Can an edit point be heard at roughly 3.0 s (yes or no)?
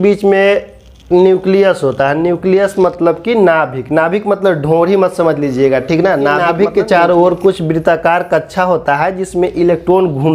no